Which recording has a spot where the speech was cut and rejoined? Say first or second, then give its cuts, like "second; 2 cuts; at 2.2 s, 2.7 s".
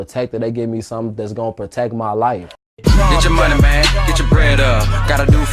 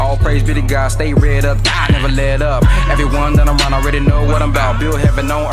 first; 1 cut; at 2.5 s